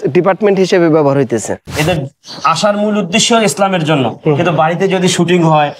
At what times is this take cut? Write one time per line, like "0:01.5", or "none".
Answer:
0:01.6